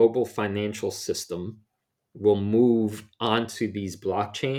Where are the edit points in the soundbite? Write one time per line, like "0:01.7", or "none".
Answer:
none